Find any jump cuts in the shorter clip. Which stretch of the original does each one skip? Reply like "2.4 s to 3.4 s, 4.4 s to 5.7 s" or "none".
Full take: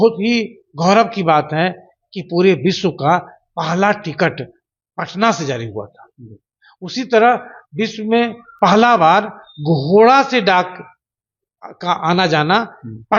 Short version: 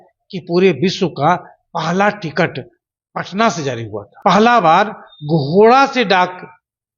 5.9 s to 8.4 s